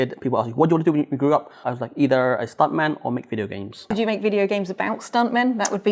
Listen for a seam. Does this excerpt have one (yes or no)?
yes